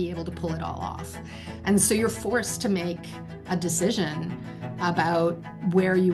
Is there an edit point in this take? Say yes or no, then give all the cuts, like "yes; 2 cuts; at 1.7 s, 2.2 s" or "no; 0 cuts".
no; 0 cuts